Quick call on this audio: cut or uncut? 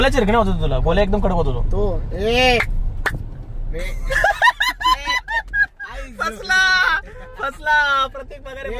uncut